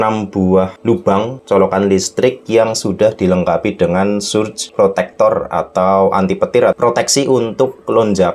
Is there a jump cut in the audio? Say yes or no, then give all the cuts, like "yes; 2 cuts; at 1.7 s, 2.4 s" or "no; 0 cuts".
yes; 3 cuts; at 1.0 s, 4.6 s, 6.7 s